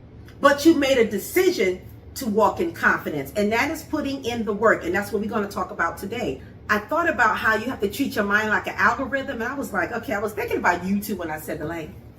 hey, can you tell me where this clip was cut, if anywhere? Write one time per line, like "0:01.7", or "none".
0:06.5